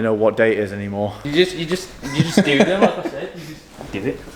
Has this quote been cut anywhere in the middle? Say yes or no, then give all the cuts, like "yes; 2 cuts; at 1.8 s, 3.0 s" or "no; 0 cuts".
yes; 1 cut; at 1.2 s